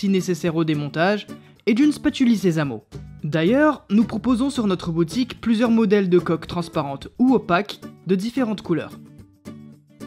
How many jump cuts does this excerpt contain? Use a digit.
1